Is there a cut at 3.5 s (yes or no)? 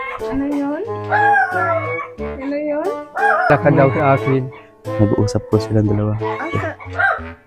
yes